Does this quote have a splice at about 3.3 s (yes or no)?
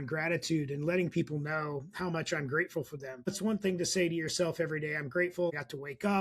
yes